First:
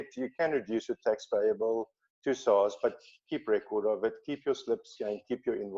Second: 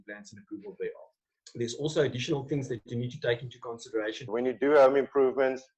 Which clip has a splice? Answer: second; 1 cut; at 4.2 s

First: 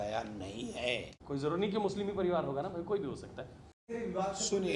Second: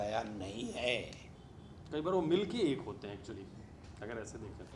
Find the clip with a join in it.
first; 2 cuts; at 1.1 s, 3.9 s

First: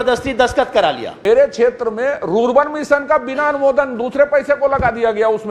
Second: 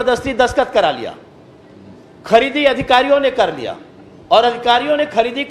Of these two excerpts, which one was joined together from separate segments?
first; 1 cut; at 1.2 s

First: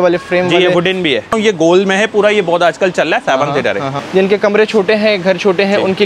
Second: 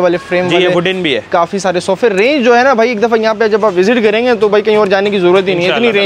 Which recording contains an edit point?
first; 2 cuts; at 1.3 s, 3.9 s

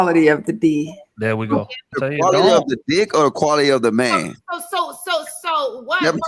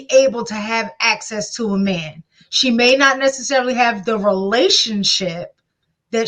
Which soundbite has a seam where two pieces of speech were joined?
first; 1 cut; at 1.9 s

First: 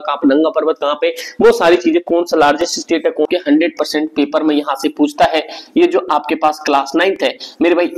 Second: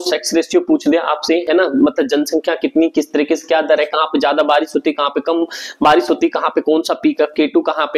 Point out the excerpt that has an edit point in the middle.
first; 1 cut; at 3.3 s

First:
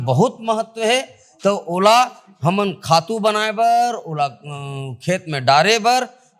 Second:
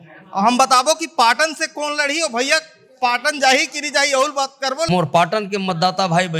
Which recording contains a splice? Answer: second; 1 cut; at 4.9 s

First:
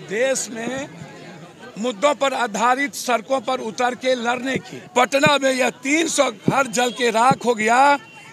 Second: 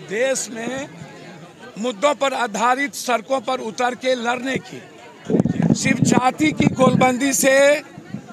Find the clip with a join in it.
first; 1 cut; at 4.8 s

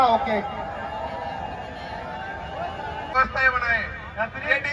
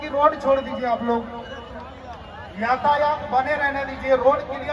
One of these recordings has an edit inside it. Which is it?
first; 1 cut; at 3.1 s

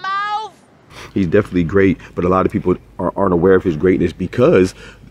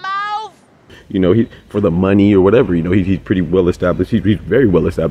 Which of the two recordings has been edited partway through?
first; 1 cut; at 1.0 s

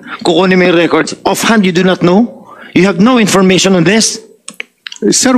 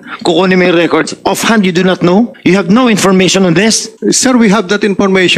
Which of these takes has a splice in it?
second; 2 cuts; at 2.3 s, 3.9 s

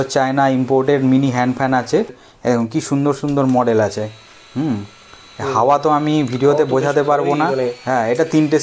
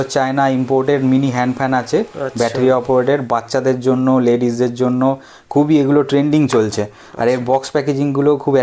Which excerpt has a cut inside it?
first; 1 cut; at 2.2 s

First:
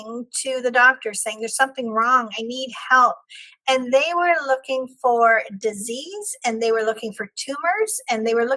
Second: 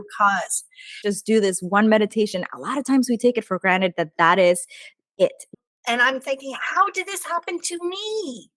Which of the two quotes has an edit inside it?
second; 2 cuts; at 1.0 s, 5.5 s

